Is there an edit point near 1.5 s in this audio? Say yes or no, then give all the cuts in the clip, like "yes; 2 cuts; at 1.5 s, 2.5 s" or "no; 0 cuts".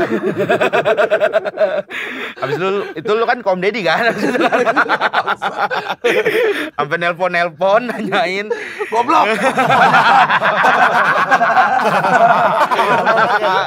no; 0 cuts